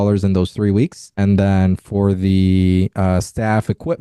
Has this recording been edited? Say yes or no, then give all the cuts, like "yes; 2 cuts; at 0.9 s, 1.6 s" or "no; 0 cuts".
no; 0 cuts